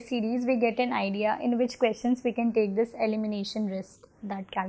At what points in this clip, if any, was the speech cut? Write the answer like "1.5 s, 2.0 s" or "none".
none

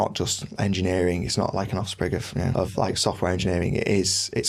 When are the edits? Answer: none

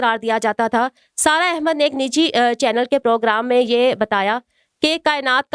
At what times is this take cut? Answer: none

